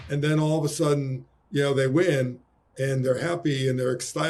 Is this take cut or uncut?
uncut